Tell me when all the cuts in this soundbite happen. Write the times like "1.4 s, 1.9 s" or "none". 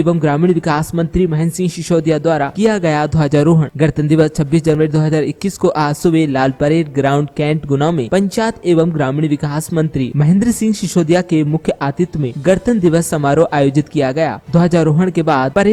none